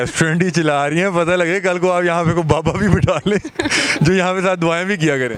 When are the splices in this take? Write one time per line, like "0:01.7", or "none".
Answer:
none

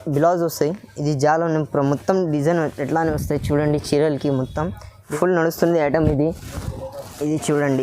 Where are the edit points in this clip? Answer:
0:05.1

